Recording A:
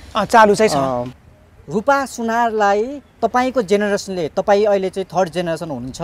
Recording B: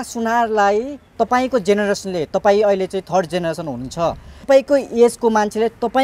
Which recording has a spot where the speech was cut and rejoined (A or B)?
A